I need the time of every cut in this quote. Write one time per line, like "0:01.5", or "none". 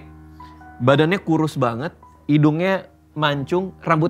none